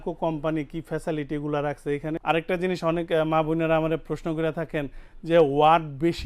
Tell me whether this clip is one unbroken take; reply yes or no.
no